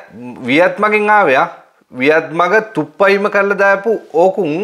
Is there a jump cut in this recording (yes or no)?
no